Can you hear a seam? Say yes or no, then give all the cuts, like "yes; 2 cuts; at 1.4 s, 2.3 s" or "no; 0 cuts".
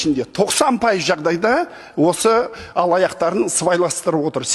no; 0 cuts